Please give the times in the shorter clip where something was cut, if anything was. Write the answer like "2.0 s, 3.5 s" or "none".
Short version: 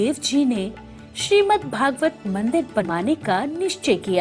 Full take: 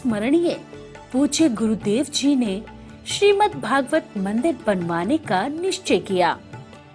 2.9 s